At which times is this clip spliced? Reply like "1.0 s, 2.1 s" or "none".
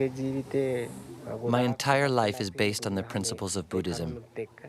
1.5 s